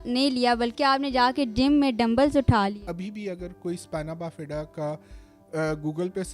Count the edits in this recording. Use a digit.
1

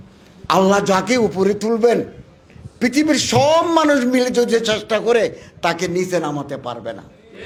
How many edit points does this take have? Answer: 0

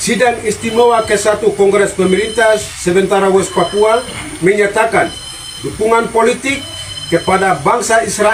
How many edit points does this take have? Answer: 0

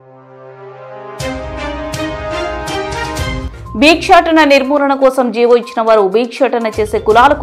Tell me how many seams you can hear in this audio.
1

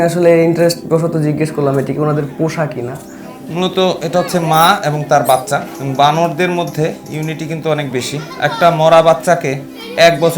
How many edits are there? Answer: 1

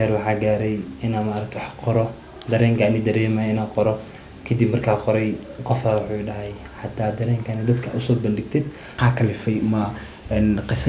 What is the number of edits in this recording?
1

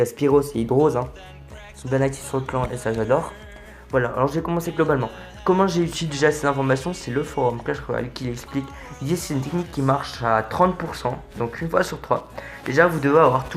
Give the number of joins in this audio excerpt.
1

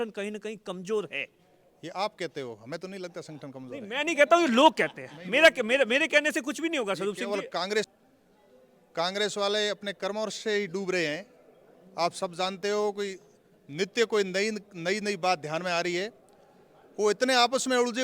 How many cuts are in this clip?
1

